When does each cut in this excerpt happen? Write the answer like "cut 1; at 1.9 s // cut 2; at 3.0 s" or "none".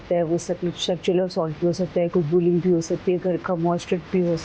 none